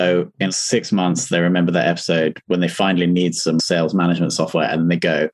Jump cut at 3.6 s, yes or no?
yes